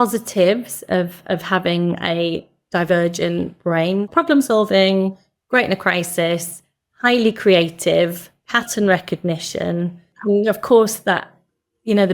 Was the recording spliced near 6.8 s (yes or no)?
no